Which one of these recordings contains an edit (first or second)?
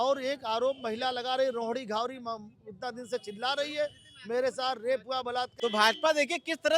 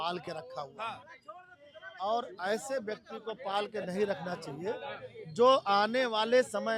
first